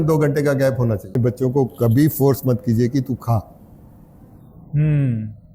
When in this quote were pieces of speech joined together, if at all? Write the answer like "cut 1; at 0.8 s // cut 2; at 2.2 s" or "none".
cut 1; at 1.1 s